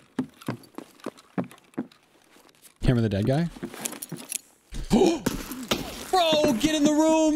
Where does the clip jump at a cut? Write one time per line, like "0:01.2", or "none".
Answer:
none